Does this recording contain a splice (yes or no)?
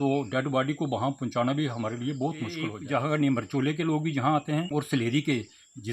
yes